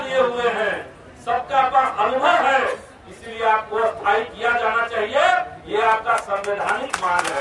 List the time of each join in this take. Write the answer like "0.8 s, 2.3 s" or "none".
none